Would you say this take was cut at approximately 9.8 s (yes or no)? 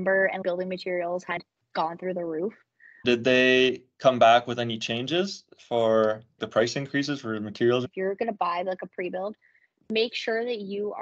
no